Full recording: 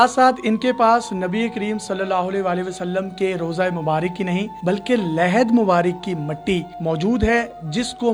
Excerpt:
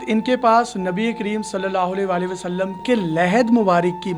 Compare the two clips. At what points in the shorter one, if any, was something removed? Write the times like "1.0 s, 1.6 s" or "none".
2.8 s